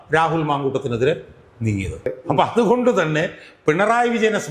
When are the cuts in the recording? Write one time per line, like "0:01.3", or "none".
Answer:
0:02.1